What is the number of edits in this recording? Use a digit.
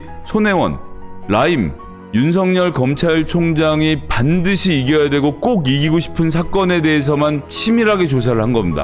0